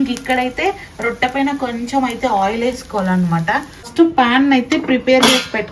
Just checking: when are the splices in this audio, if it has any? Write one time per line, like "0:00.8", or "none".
0:03.9